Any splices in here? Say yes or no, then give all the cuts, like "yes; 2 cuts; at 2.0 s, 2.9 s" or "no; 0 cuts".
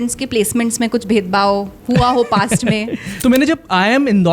yes; 1 cut; at 3.0 s